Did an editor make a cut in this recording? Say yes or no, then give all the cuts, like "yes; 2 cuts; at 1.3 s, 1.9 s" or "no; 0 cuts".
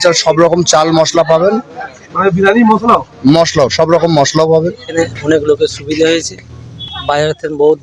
yes; 1 cut; at 4.8 s